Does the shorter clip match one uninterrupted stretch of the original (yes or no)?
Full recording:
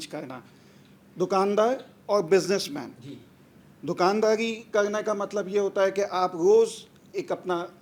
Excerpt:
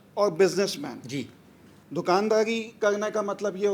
yes